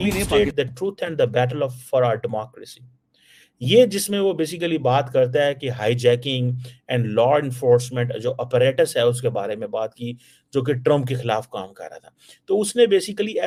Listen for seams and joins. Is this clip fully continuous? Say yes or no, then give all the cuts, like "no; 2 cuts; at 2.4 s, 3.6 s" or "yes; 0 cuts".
yes; 0 cuts